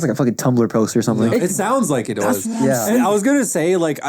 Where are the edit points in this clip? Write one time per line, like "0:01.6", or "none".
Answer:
none